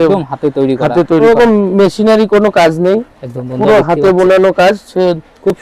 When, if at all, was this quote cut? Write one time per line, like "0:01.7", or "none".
0:01.2